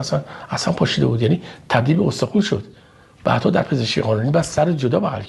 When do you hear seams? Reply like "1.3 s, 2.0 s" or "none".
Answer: none